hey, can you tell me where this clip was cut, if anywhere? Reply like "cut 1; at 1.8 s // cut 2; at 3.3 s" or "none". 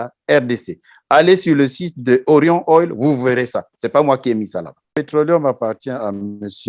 cut 1; at 5.0 s